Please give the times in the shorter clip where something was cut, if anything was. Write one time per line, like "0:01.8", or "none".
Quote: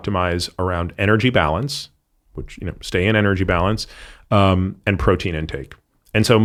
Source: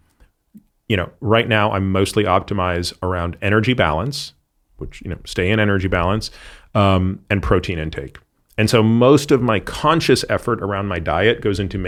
none